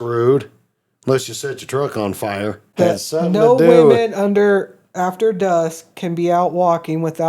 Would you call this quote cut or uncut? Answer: cut